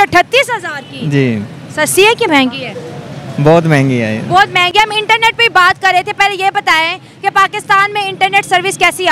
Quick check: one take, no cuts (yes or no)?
yes